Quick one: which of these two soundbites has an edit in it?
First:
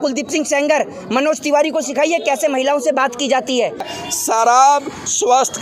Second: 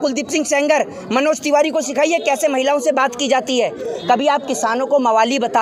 first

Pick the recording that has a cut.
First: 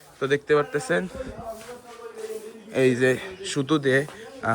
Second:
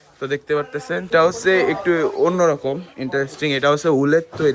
second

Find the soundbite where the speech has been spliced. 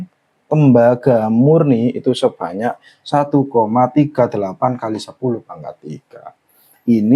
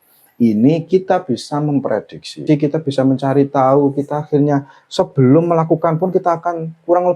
second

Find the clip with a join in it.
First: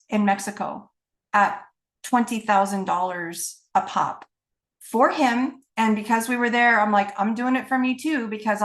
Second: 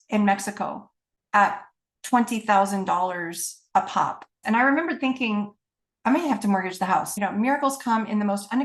second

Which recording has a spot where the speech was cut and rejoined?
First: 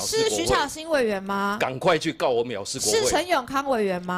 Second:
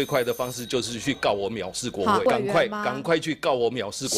second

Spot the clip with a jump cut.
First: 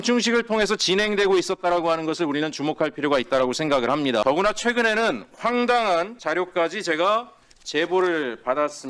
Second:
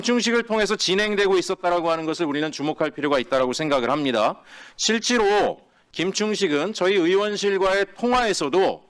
first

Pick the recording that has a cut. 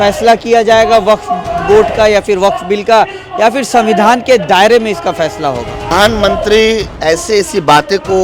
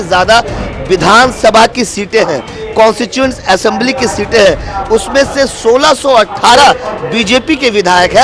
first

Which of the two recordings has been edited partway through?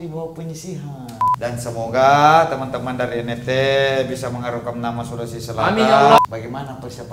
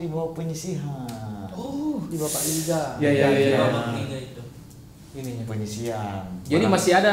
first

